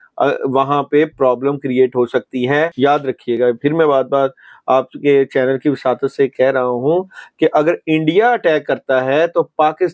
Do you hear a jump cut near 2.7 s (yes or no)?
yes